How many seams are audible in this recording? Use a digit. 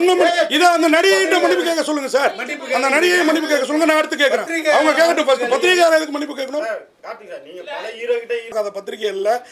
1